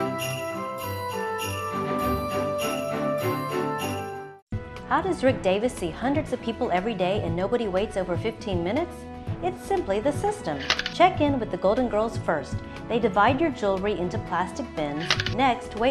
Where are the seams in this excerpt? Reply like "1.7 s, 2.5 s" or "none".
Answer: 4.1 s